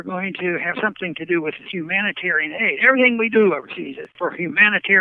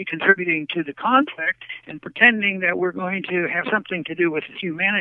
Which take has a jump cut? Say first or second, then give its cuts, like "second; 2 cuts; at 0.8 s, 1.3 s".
first; 1 cut; at 4.0 s